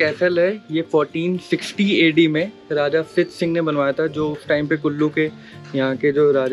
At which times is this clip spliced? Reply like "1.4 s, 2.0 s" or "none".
none